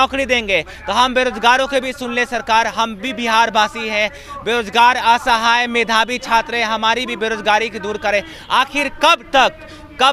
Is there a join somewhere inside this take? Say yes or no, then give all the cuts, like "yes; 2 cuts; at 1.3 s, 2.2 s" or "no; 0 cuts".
no; 0 cuts